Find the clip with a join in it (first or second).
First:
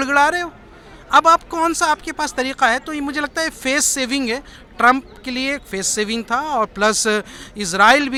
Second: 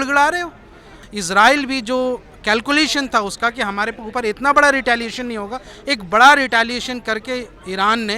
second